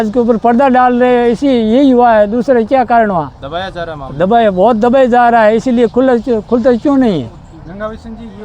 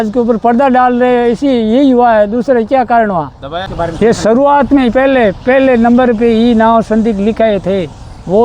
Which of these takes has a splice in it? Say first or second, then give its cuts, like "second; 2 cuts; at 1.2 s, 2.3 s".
second; 1 cut; at 3.6 s